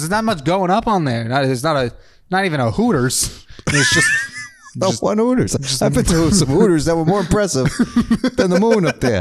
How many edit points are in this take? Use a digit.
0